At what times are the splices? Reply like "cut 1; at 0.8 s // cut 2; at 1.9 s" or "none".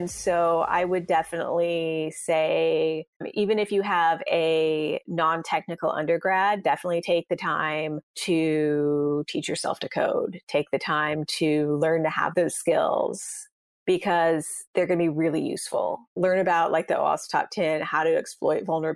none